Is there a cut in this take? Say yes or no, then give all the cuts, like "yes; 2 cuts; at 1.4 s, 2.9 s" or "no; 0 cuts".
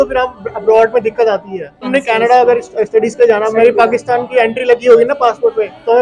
yes; 1 cut; at 1.9 s